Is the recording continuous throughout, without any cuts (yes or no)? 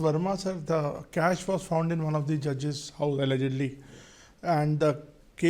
yes